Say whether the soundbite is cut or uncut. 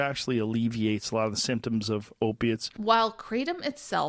cut